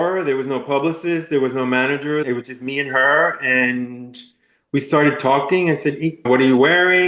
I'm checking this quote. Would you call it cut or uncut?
cut